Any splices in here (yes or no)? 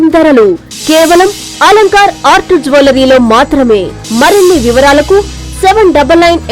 yes